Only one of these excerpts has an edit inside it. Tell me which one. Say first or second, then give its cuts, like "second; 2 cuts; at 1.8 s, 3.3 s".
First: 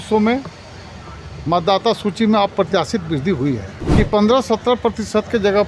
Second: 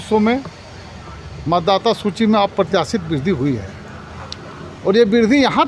first; 1 cut; at 3.8 s